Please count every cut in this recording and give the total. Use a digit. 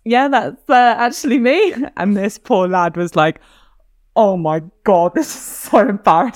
0